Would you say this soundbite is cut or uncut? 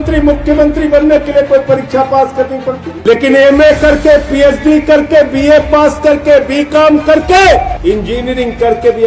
cut